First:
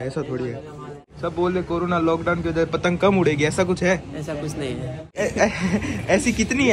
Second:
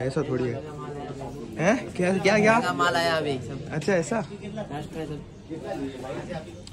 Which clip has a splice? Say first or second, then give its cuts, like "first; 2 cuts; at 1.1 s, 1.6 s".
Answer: first; 2 cuts; at 1.0 s, 5.2 s